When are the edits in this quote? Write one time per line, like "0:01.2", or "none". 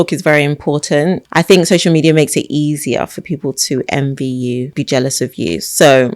0:01.2
0:04.7